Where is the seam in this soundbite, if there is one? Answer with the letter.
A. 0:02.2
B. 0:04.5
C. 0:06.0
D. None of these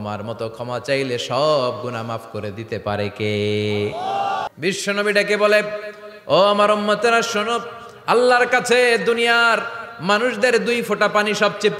B